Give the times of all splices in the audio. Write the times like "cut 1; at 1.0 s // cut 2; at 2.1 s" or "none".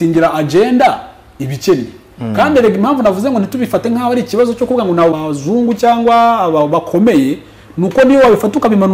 cut 1; at 5.2 s